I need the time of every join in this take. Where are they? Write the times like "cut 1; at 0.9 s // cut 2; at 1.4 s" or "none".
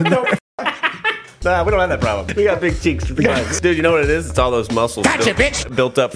cut 1; at 1.4 s // cut 2; at 2.3 s // cut 3; at 3.5 s